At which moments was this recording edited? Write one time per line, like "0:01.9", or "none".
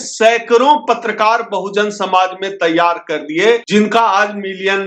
0:03.6

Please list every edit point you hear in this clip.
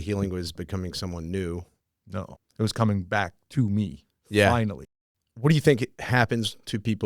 0:02.2
0:04.8
0:06.0

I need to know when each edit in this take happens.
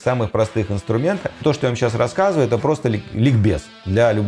0:01.4

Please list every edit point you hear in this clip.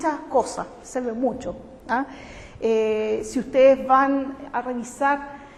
none

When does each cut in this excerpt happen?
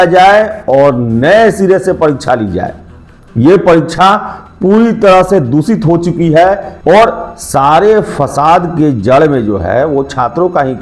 0:06.7

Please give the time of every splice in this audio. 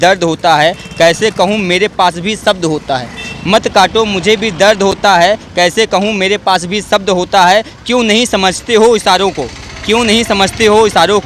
none

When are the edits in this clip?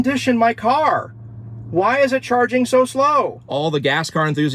0:03.4

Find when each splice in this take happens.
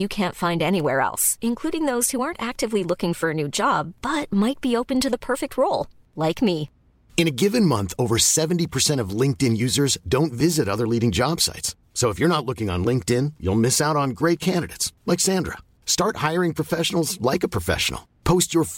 none

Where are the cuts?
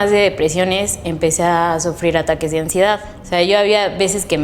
0:03.1

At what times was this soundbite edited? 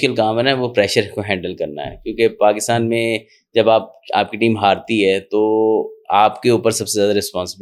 none

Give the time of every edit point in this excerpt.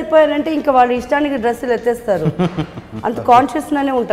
none

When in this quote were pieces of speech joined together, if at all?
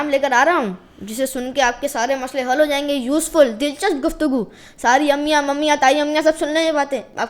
none

